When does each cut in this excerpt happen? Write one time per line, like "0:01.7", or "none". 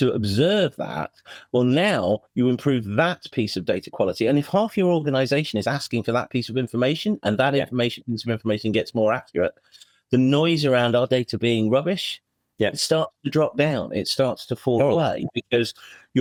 none